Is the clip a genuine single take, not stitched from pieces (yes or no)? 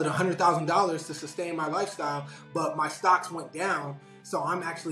yes